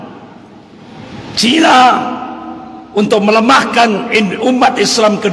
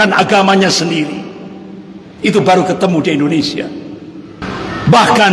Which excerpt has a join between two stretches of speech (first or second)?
second